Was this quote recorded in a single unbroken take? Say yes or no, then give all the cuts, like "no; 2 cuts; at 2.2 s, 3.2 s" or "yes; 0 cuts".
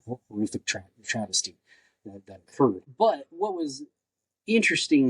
no; 1 cut; at 2.9 s